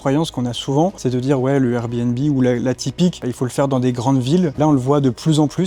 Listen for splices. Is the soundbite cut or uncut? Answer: cut